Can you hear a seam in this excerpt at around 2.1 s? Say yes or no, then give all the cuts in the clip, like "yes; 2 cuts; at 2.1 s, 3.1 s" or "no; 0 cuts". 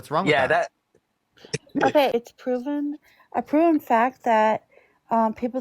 yes; 1 cut; at 2.1 s